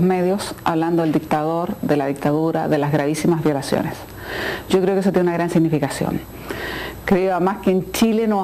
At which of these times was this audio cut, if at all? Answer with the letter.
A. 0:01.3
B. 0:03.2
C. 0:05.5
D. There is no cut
C